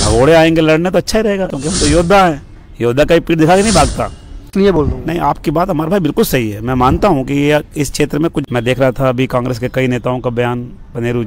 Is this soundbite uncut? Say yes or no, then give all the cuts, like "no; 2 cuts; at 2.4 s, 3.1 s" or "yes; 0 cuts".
no; 3 cuts; at 1.5 s, 4.8 s, 8.4 s